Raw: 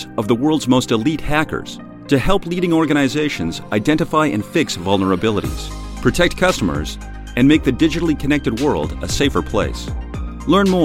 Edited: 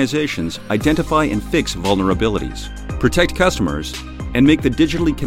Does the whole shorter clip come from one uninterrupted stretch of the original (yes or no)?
yes